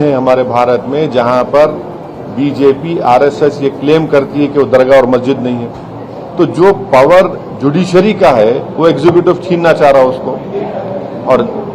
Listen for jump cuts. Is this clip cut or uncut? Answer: uncut